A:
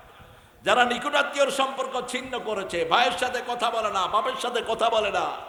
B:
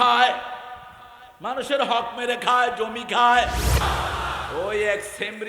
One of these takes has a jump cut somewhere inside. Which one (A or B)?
B